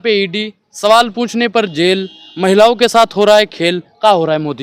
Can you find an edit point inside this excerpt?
no; 0 cuts

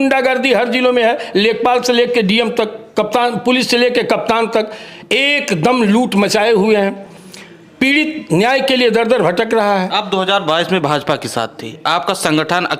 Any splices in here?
no; 0 cuts

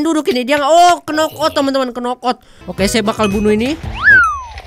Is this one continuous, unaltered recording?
no; 1 cut; at 2.7 s

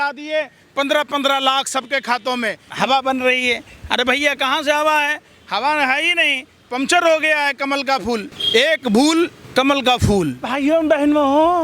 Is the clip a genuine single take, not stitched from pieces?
no; 4 cuts; at 2.6 s, 8.3 s, 9.4 s, 10.4 s

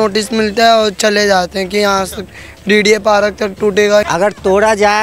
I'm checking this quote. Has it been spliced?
yes; 1 cut; at 4.0 s

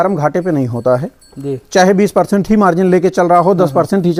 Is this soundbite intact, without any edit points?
yes; 0 cuts

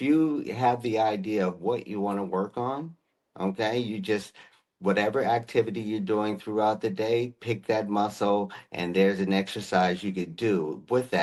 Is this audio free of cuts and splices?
yes; 0 cuts

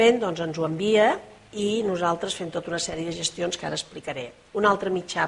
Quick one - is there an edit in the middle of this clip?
yes; 1 cut; at 3.3 s

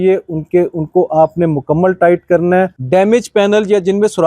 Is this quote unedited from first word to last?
no; 1 cut; at 2.8 s

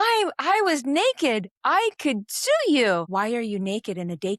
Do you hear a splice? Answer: yes; 1 cut; at 3.1 s

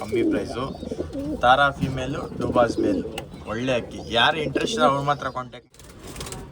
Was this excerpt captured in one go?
no; 1 cut; at 5.6 s

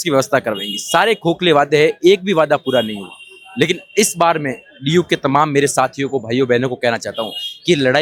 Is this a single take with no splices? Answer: yes; 0 cuts

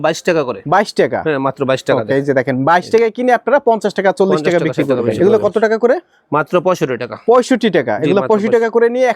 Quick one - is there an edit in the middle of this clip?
yes; 1 cut; at 5.1 s

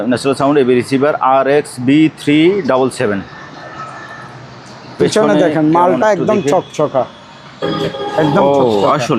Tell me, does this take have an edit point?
no; 0 cuts

